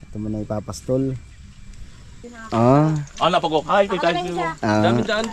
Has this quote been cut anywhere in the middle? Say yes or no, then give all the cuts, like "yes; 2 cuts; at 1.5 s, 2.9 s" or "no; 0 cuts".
yes; 1 cut; at 2.3 s